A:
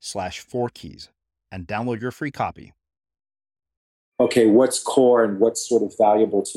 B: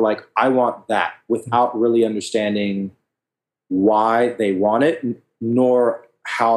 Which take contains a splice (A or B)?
A